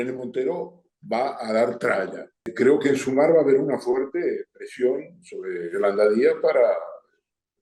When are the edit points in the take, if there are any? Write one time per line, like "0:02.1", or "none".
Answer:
0:02.5